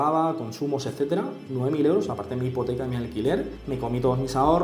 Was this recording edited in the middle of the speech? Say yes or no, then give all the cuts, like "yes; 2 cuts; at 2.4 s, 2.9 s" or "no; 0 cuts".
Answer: yes; 1 cut; at 3.5 s